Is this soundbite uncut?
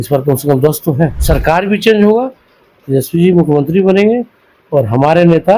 no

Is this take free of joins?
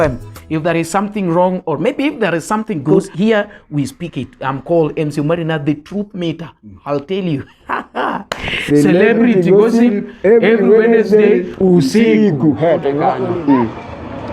no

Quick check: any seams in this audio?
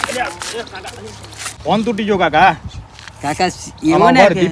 yes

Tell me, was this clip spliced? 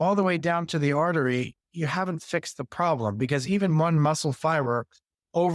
no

